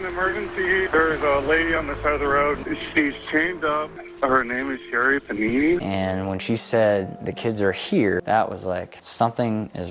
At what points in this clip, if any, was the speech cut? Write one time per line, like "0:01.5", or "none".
0:02.6
0:04.0
0:05.8